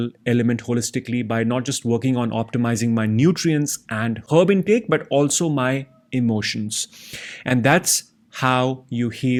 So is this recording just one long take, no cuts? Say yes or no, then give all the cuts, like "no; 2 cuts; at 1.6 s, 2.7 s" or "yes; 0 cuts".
yes; 0 cuts